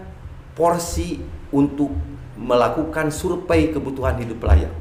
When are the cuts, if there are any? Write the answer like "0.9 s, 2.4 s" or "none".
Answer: none